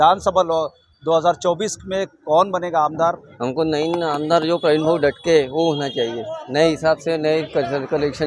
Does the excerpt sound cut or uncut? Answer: cut